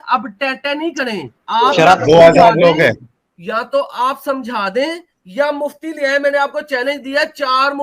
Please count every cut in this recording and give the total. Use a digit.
1